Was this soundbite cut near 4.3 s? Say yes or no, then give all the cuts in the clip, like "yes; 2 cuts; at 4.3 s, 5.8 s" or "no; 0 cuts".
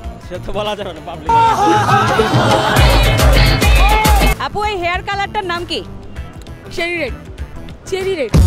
yes; 1 cut; at 4.3 s